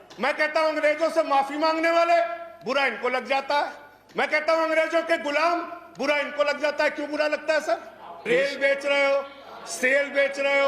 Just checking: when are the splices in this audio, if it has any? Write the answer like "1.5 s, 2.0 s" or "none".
8.4 s